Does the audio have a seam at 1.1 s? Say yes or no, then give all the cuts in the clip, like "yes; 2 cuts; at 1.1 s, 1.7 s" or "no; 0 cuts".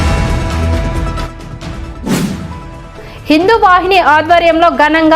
yes; 1 cut; at 1.1 s